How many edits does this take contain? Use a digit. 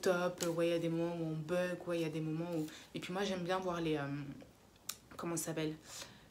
0